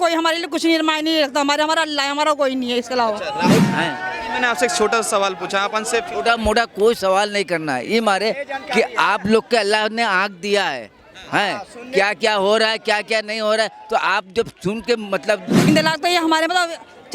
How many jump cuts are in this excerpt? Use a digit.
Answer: 2